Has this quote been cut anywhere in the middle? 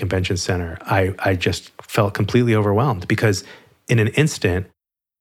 no; 0 cuts

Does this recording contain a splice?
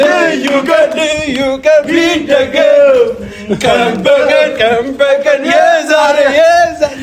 no; 0 cuts

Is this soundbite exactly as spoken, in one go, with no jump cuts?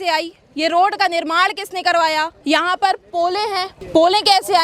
no; 2 cuts; at 2.3 s, 3.7 s

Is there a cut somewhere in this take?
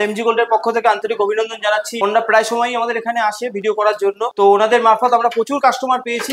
no; 0 cuts

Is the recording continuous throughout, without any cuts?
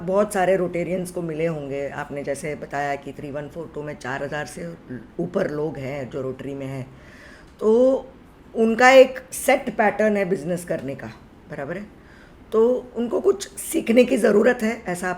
yes; 0 cuts

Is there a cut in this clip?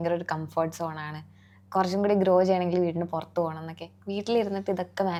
no; 0 cuts

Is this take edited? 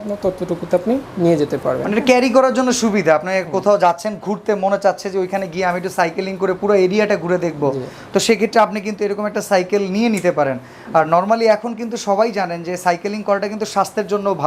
no; 0 cuts

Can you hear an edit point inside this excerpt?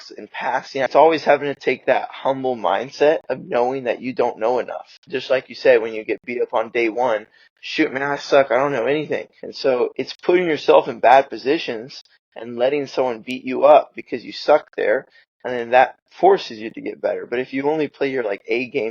yes; 3 cuts; at 0.9 s, 5.0 s, 9.8 s

